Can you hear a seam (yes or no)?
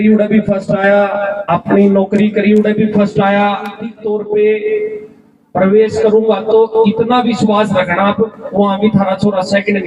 yes